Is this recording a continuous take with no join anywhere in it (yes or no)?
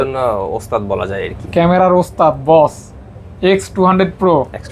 yes